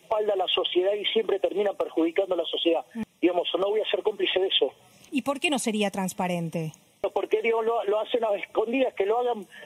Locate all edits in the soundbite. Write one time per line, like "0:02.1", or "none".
0:03.0
0:05.0
0:07.0